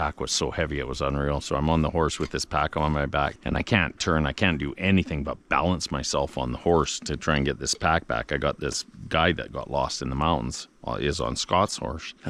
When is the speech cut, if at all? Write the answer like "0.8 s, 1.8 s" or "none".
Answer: none